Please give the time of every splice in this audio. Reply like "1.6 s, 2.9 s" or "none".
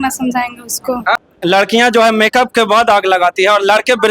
1.2 s